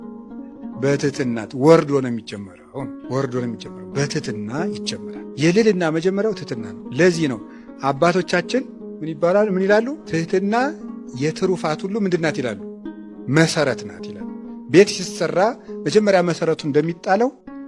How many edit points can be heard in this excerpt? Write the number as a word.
zero